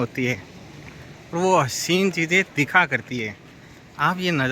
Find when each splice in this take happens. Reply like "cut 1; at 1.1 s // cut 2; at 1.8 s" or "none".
none